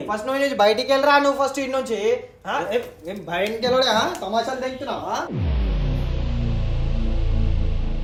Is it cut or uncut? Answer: uncut